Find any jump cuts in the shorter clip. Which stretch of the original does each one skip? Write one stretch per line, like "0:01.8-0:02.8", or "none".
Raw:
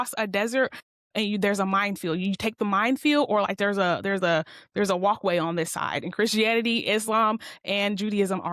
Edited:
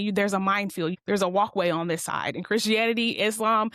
0:02.2-0:04.6